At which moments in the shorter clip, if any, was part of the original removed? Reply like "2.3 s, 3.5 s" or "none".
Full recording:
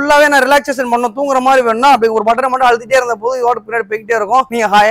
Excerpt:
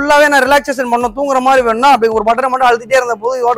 none